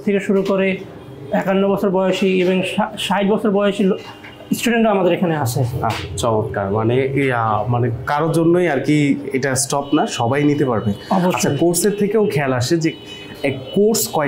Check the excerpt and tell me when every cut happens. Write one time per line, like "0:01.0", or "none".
none